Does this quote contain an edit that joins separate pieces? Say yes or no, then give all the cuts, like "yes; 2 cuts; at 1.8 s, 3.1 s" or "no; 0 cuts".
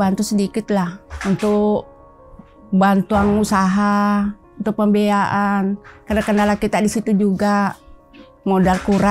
no; 0 cuts